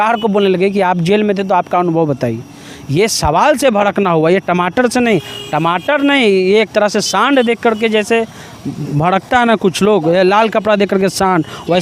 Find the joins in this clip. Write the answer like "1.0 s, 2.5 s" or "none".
none